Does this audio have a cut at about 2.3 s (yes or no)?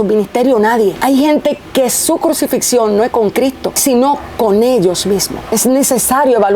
no